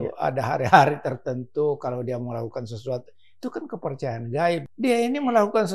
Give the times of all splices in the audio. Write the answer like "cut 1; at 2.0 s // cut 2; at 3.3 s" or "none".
cut 1; at 4.7 s